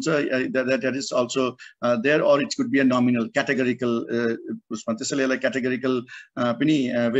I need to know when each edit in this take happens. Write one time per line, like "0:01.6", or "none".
none